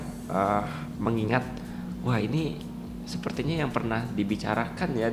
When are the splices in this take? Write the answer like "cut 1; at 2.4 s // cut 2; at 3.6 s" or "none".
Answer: none